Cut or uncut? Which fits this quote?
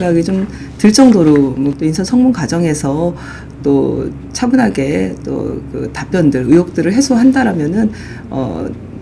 cut